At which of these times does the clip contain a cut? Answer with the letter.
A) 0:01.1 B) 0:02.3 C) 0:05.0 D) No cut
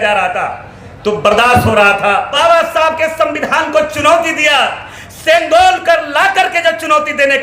B